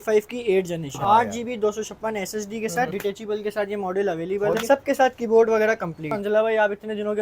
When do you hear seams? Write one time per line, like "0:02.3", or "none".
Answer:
0:01.0
0:02.9
0:04.6
0:06.1

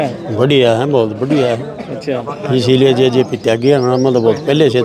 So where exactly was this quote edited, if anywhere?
none

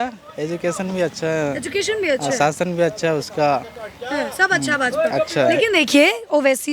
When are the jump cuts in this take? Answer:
none

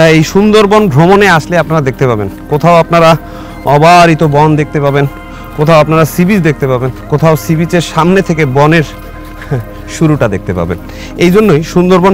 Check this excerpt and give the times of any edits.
none

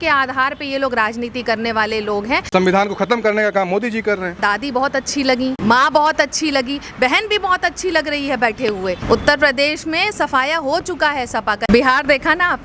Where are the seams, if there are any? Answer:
0:02.5
0:04.4
0:05.6
0:09.0
0:11.7

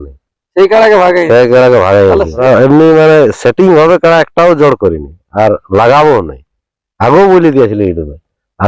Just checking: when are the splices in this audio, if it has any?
0:02.4

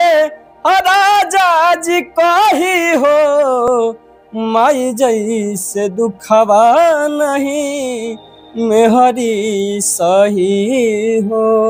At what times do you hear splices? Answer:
none

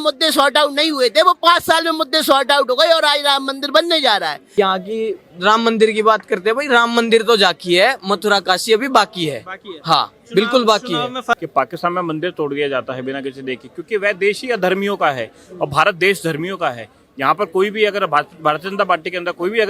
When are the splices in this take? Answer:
0:04.4
0:11.4

